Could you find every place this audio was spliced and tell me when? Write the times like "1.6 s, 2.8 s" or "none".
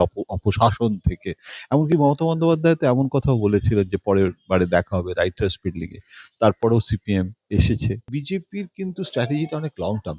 8.1 s